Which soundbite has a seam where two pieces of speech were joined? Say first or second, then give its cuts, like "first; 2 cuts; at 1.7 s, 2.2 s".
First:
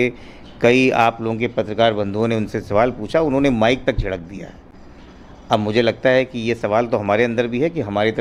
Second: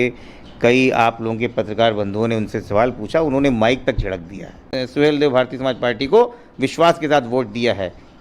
second; 1 cut; at 4.7 s